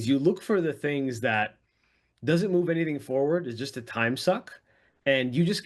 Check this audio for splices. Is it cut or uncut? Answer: uncut